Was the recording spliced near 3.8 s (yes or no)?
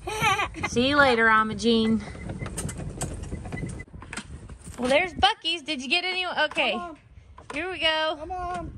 yes